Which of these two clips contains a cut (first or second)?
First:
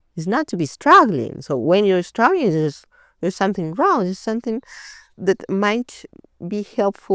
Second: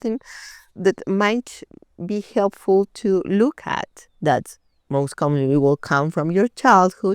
second